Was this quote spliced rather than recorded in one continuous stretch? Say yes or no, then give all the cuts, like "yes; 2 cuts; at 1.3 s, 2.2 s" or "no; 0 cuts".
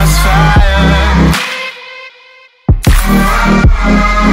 no; 0 cuts